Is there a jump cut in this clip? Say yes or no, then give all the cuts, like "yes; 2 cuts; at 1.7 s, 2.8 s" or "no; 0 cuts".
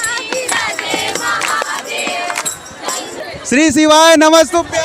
yes; 1 cut; at 3.2 s